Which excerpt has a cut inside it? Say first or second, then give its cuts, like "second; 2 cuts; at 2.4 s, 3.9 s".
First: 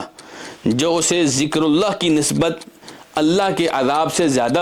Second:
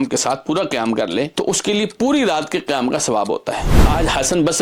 second; 2 cuts; at 1.3 s, 3.9 s